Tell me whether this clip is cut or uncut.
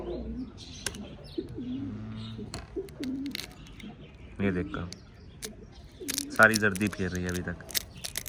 uncut